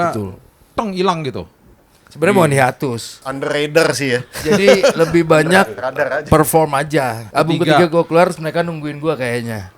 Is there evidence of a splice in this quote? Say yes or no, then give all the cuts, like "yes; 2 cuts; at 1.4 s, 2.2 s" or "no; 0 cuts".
yes; 2 cuts; at 3.2 s, 7.2 s